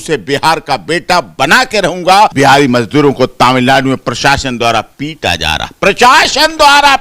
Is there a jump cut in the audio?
yes; 1 cut; at 2.3 s

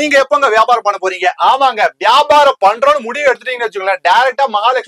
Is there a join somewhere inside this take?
no; 0 cuts

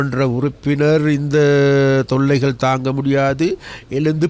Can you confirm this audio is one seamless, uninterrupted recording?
yes; 0 cuts

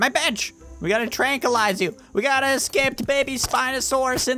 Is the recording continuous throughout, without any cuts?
yes; 0 cuts

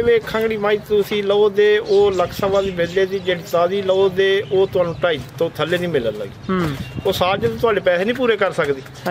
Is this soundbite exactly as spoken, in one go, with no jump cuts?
yes; 0 cuts

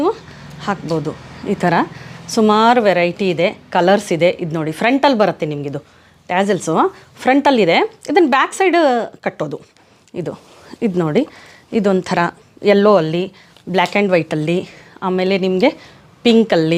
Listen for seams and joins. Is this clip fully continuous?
yes; 0 cuts

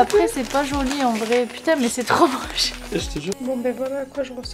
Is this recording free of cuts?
no; 1 cut; at 3.4 s

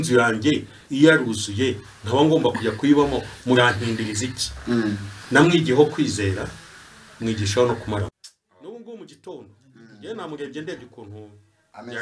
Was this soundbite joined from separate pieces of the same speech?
yes; 1 cut; at 8.2 s

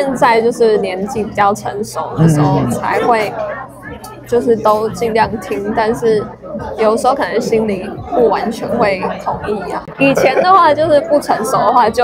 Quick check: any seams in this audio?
no; 0 cuts

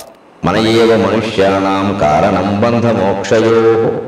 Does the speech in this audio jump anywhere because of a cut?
no; 0 cuts

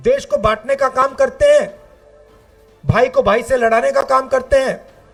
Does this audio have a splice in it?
no; 0 cuts

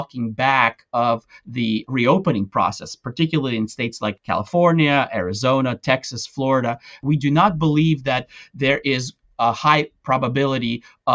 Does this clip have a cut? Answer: yes; 3 cuts; at 1.9 s, 4.2 s, 7.0 s

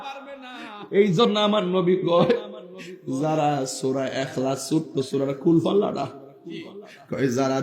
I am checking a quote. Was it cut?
no; 0 cuts

